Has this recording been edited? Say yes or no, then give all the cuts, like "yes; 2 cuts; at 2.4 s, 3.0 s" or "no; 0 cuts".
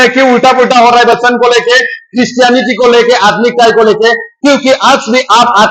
no; 0 cuts